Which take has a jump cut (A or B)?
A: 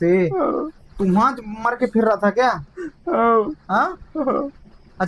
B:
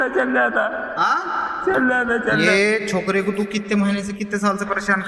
B